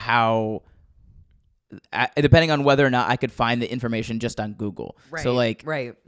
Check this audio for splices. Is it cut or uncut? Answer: uncut